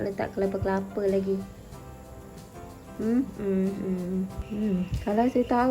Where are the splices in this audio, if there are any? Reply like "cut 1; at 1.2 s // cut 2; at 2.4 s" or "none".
cut 1; at 4.4 s